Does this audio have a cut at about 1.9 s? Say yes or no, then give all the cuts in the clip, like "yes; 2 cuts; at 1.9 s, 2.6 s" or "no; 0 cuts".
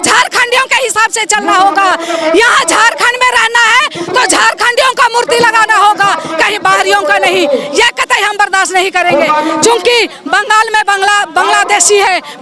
no; 0 cuts